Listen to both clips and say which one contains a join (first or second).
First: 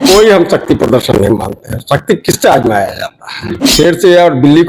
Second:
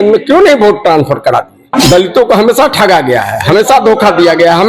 second